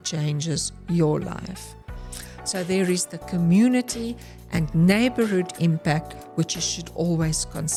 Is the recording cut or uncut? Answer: uncut